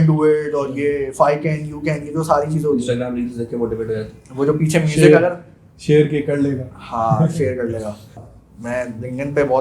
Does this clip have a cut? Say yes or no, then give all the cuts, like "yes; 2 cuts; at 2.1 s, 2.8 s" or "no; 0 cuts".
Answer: yes; 1 cut; at 8.2 s